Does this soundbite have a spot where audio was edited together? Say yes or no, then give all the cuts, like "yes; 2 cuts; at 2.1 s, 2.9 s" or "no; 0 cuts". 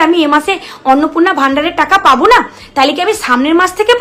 no; 0 cuts